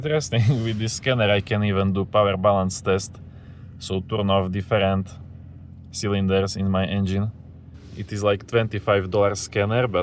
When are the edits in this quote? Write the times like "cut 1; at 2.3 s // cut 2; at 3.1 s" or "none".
none